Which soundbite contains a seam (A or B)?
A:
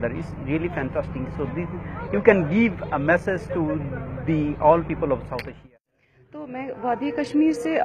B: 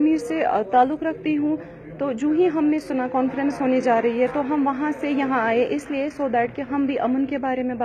A